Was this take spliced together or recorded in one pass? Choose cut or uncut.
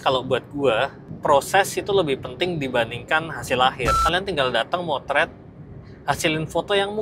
cut